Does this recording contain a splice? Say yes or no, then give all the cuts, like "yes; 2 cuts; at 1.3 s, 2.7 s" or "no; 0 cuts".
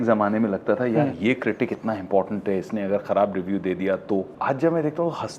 yes; 1 cut; at 4.3 s